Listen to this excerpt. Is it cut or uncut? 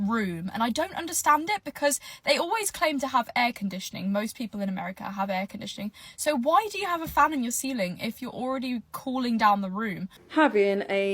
cut